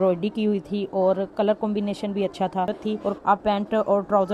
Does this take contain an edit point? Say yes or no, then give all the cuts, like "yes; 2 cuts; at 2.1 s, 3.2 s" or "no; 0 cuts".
yes; 1 cut; at 3.2 s